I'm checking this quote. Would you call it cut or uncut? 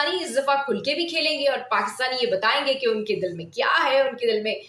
uncut